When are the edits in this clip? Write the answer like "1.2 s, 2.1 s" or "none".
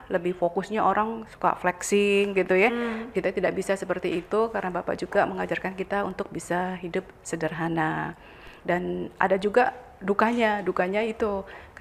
none